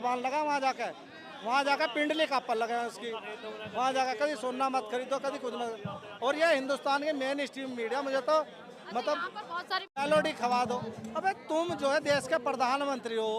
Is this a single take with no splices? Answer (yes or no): no